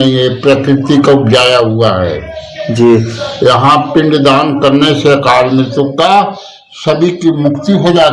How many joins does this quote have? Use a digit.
0